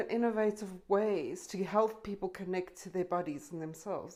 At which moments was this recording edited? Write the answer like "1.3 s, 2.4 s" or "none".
none